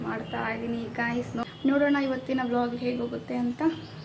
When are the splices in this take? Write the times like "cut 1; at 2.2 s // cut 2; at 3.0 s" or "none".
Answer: cut 1; at 1.4 s